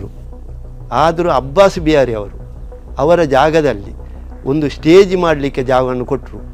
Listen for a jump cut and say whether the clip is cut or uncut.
uncut